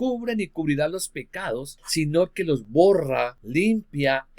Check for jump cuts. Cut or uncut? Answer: cut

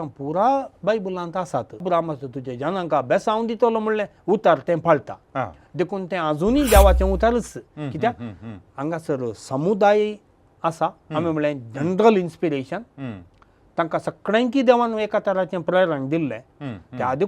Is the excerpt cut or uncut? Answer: cut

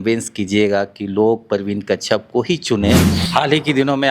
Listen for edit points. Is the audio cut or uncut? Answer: cut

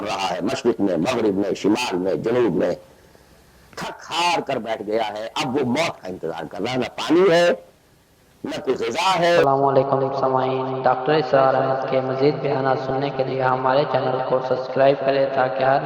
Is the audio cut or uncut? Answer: cut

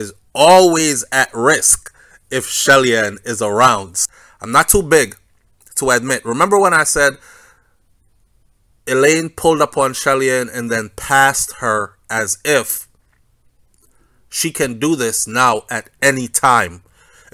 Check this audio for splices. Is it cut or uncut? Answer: cut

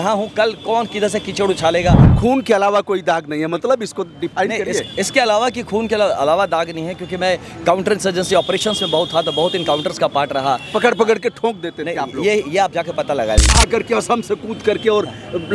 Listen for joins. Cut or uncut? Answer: cut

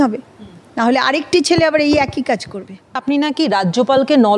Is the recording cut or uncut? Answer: cut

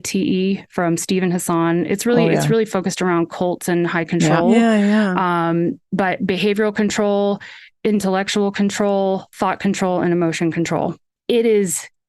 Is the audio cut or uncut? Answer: cut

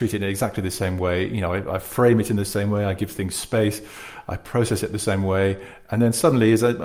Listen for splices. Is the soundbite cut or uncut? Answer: uncut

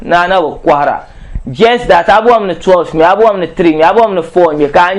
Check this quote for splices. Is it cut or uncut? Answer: uncut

